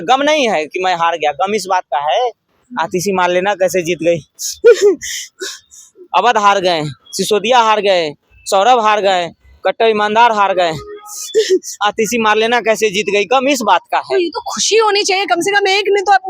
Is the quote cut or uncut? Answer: uncut